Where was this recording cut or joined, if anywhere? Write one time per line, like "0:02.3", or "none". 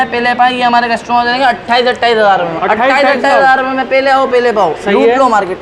none